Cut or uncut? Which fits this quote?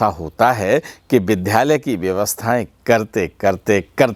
uncut